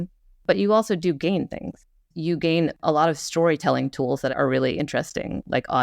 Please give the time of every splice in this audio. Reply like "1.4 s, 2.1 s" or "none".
2.8 s, 4.3 s

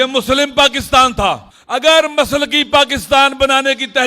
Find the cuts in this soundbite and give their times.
1.5 s

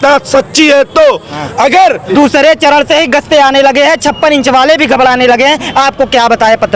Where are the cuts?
2.1 s

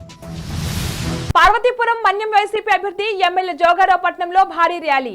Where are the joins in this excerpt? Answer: 1.3 s

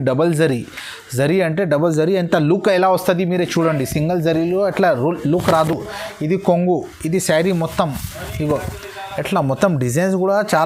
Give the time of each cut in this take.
none

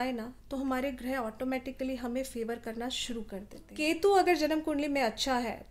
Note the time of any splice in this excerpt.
3.7 s

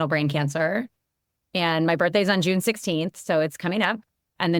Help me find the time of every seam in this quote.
none

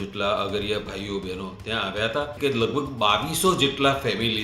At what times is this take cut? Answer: 2.3 s

